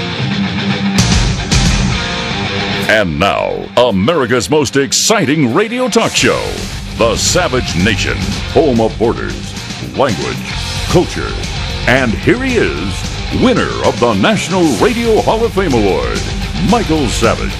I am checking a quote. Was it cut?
no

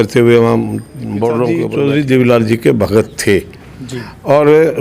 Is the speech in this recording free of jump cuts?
no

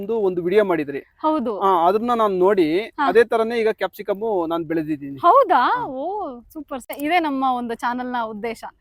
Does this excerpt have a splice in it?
yes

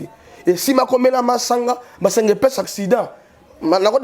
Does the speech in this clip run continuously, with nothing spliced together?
no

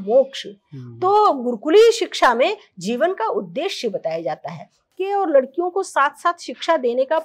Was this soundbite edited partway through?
yes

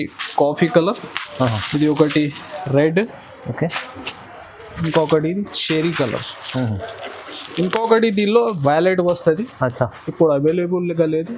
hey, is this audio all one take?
yes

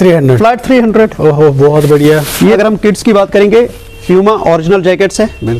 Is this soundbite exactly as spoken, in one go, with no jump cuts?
no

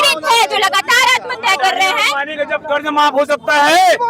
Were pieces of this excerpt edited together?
no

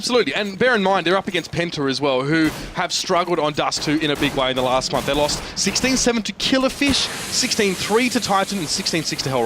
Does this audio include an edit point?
yes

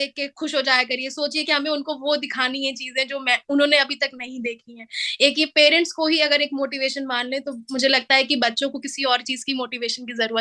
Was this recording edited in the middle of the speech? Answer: no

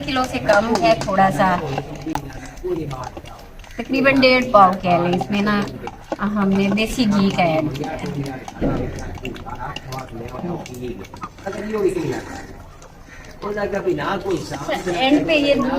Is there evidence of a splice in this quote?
no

